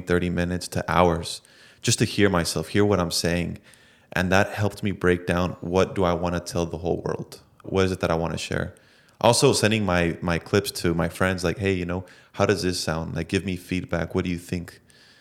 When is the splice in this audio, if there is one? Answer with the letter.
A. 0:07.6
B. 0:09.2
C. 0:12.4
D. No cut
A